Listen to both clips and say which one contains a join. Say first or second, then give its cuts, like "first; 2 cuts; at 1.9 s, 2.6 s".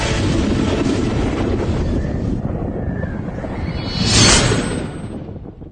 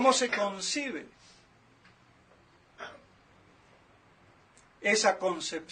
first; 1 cut; at 3.0 s